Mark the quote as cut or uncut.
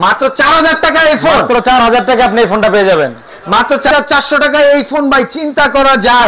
cut